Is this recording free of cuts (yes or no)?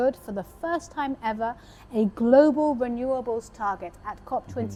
yes